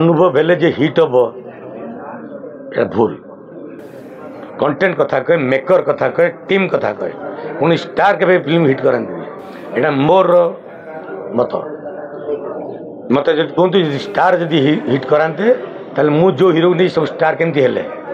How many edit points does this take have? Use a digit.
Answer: 0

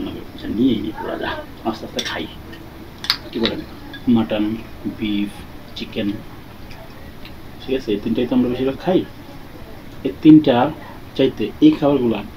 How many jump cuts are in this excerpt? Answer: 1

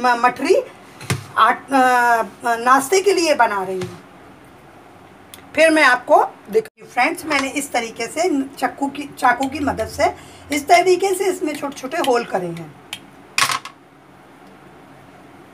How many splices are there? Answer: 1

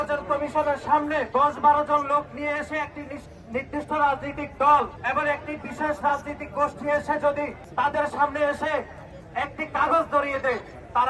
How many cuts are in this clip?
3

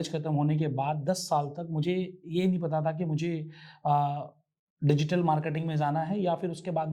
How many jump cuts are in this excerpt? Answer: 0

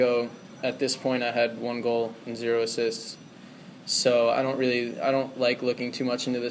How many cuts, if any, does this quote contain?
0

